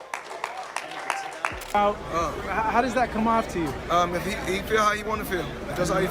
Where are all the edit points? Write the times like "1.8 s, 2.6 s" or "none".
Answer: 1.6 s

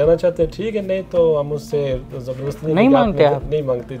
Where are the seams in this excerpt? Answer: none

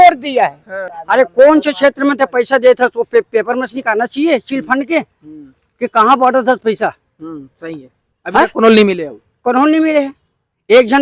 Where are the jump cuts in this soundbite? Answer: 1.0 s

